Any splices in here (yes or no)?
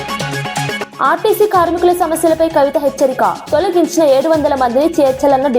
yes